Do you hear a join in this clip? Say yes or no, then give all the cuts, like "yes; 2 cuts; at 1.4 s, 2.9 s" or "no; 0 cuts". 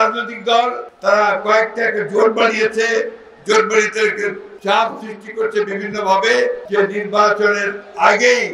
no; 0 cuts